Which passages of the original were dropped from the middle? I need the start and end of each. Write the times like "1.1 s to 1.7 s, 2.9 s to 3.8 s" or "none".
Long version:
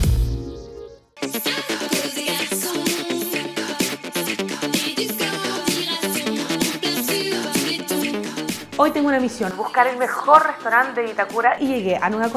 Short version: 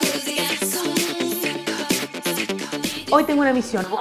4.9 s to 8.6 s